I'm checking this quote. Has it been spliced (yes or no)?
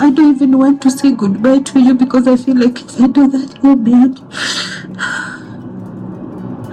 no